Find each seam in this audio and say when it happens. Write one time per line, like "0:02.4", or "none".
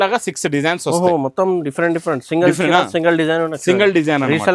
none